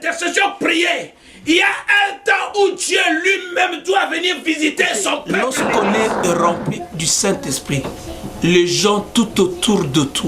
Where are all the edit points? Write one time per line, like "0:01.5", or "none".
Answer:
0:05.5